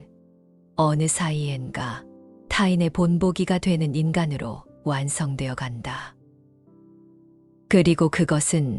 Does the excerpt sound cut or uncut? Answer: cut